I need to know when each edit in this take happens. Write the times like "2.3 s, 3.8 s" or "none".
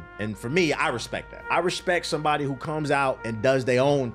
1.3 s, 3.2 s